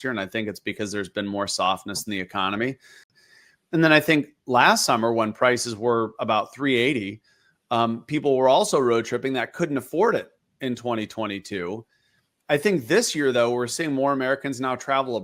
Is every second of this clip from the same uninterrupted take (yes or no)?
no